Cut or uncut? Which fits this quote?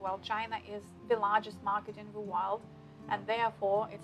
cut